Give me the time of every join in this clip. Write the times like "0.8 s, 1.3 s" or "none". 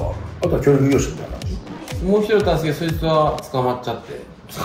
none